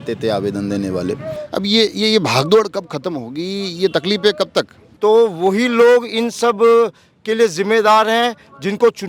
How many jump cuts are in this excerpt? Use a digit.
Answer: 2